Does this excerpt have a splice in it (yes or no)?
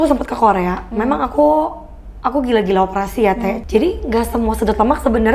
yes